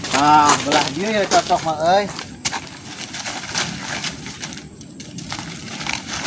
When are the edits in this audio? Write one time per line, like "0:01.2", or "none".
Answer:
none